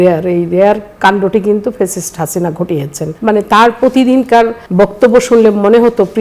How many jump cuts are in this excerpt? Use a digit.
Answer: 2